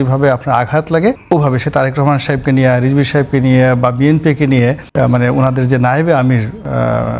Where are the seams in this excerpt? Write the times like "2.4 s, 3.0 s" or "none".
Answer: 1.2 s, 4.8 s

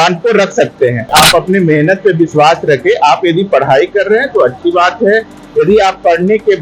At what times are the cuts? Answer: 1.1 s

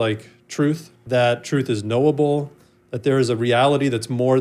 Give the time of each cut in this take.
1.0 s

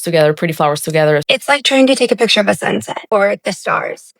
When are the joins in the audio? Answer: 1.2 s, 3.0 s

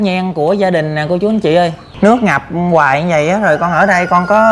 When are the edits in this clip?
1.8 s

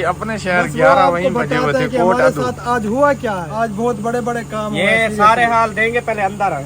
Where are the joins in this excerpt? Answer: 3.4 s

